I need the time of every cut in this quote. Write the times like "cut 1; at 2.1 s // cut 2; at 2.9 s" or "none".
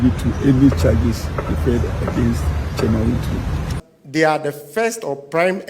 cut 1; at 3.7 s